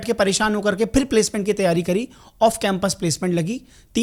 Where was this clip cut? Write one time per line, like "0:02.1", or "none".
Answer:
none